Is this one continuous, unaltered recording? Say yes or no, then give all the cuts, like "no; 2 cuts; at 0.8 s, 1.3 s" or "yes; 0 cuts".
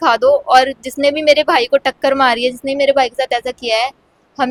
yes; 0 cuts